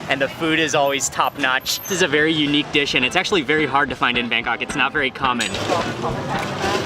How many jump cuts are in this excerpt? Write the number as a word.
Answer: two